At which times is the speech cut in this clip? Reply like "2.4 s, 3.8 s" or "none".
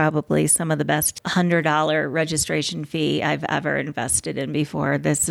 1.2 s